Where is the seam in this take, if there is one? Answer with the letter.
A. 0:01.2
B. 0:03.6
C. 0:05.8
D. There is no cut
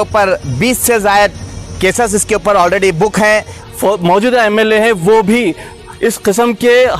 B